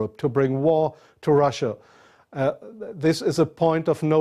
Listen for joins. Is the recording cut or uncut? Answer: cut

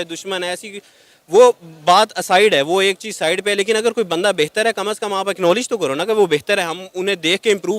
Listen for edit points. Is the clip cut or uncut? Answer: uncut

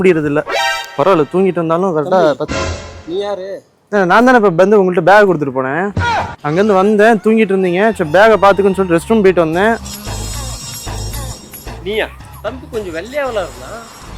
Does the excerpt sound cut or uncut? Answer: cut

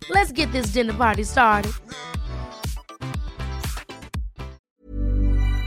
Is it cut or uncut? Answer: cut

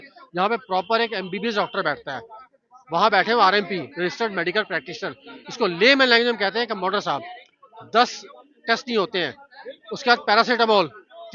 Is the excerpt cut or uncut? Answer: uncut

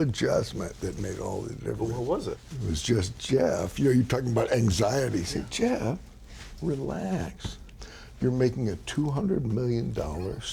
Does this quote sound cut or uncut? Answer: cut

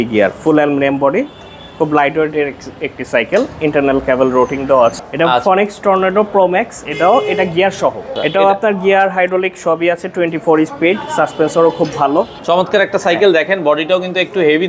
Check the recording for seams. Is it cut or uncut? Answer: cut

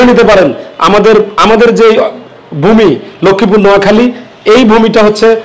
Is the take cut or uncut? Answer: uncut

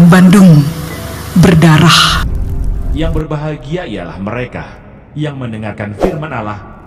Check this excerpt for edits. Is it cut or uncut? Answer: cut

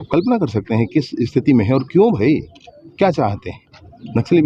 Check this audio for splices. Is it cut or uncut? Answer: uncut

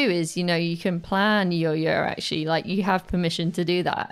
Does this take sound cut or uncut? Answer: uncut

